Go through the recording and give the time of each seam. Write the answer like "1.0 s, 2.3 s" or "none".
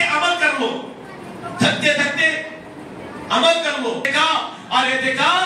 4.0 s